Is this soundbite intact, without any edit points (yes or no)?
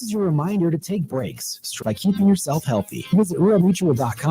no